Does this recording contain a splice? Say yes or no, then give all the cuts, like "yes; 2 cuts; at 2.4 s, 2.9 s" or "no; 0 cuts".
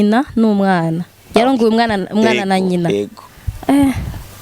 no; 0 cuts